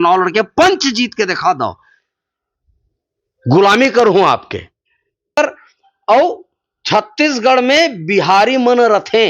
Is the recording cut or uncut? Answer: cut